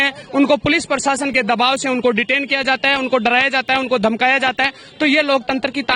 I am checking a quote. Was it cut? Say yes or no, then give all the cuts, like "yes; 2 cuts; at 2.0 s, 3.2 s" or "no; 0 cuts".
no; 0 cuts